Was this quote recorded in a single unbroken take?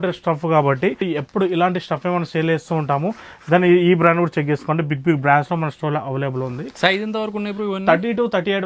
yes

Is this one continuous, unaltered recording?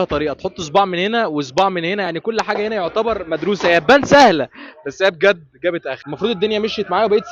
yes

